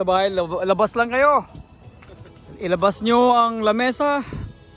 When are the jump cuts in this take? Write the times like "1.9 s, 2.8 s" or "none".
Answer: none